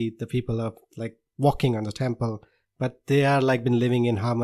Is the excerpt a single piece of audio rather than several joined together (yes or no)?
yes